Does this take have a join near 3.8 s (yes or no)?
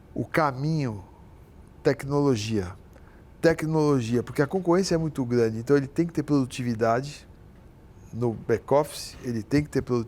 no